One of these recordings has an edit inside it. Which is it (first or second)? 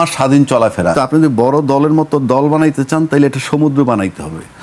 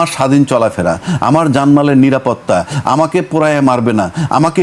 first